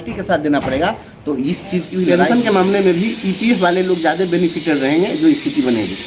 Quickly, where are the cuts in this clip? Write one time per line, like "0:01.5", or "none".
0:02.2